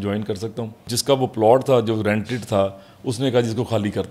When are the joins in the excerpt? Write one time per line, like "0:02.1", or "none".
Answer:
0:00.9